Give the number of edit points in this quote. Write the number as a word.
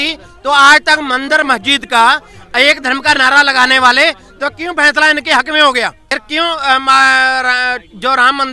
one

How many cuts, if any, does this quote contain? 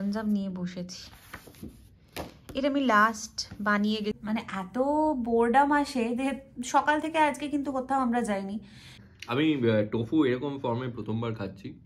two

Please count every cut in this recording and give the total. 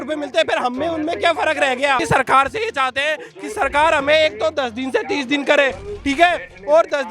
one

